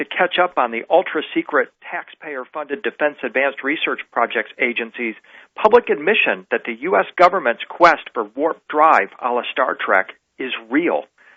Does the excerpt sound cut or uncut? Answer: uncut